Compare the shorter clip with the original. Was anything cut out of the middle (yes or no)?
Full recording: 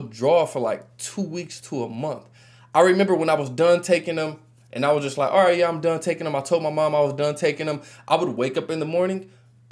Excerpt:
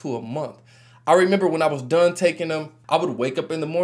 yes